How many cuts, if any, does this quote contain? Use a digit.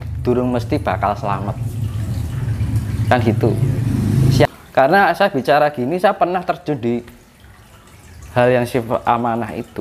1